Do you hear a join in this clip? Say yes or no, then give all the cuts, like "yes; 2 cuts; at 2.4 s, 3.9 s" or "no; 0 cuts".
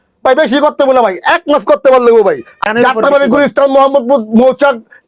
yes; 1 cut; at 2.6 s